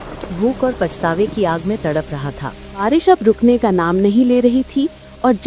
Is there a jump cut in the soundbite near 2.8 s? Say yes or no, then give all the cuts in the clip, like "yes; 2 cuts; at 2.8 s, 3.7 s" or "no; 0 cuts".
yes; 1 cut; at 2.8 s